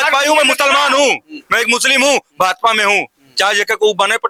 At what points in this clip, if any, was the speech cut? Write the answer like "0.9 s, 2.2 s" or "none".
none